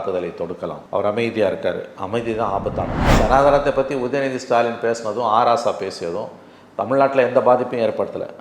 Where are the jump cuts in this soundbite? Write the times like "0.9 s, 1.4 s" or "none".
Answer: 3.0 s